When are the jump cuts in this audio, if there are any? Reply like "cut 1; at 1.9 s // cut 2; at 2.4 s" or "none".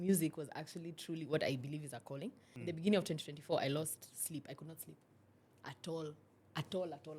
cut 1; at 2.5 s